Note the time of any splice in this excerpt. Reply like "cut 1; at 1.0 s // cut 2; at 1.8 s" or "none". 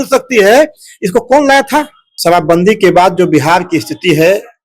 cut 1; at 2.0 s